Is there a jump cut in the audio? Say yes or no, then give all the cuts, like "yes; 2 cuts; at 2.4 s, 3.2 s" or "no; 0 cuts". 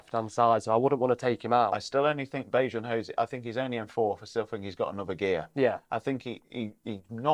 no; 0 cuts